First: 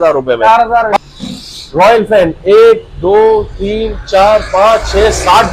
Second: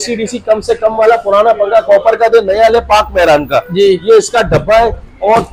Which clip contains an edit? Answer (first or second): first